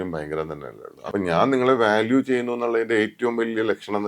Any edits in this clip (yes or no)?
yes